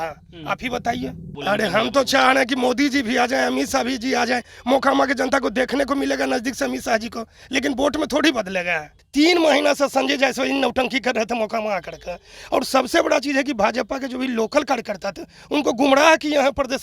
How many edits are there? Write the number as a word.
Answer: two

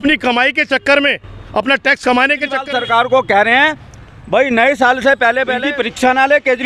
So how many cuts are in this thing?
two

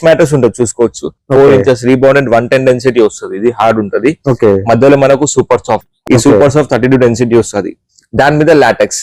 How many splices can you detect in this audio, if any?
one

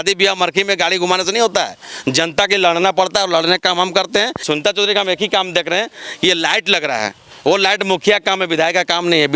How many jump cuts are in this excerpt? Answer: one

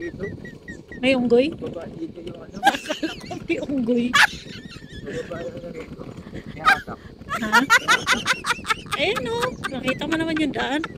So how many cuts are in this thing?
zero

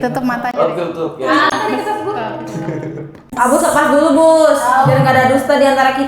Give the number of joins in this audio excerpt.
one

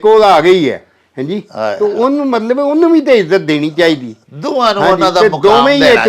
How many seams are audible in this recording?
zero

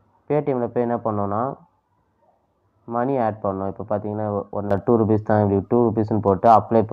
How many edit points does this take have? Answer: one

